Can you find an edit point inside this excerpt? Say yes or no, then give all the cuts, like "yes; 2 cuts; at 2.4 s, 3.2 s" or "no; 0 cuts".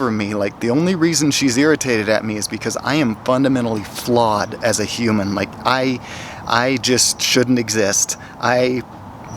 no; 0 cuts